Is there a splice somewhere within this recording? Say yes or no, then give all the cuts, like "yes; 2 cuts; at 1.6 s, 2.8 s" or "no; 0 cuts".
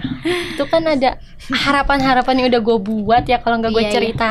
no; 0 cuts